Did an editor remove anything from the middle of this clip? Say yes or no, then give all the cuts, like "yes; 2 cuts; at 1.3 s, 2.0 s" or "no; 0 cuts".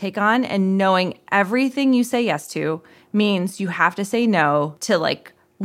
no; 0 cuts